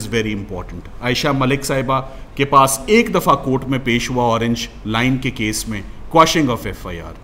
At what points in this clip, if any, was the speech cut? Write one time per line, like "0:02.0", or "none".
none